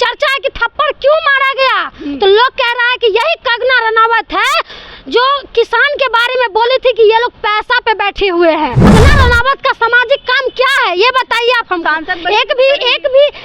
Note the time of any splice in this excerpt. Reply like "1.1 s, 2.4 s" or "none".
8.8 s